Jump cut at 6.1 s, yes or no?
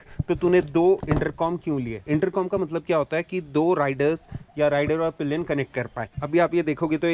yes